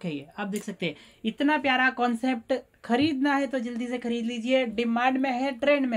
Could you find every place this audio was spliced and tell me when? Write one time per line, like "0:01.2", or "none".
none